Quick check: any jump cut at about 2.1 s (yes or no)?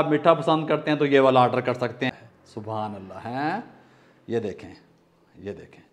yes